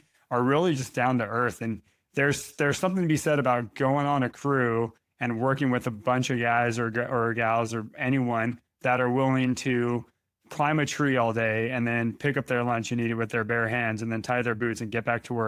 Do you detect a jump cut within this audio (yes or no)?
no